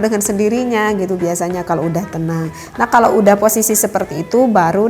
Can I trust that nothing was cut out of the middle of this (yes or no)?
yes